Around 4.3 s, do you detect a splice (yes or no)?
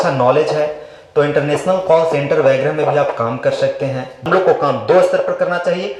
yes